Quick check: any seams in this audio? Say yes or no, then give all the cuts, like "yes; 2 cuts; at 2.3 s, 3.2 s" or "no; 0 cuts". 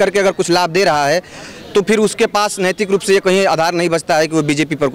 no; 0 cuts